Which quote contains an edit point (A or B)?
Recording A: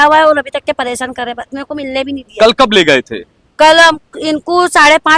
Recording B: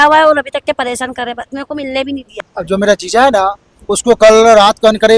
B